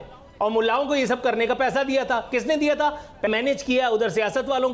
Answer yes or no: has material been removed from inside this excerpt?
yes